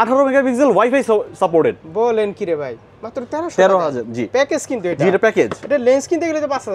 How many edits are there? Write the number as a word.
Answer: zero